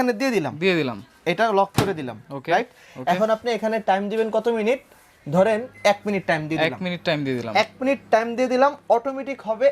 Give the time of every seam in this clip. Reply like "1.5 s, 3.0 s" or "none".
none